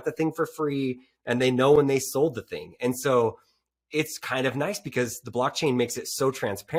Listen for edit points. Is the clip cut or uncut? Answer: uncut